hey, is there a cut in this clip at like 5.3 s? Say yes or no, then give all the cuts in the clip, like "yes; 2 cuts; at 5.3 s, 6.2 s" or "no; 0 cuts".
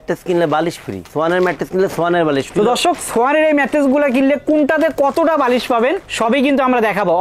no; 2 cuts; at 1.1 s, 2.5 s